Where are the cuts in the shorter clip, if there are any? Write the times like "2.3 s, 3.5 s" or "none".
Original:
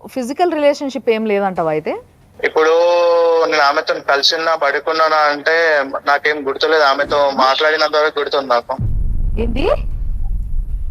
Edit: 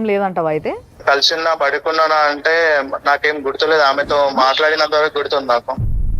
0.9 s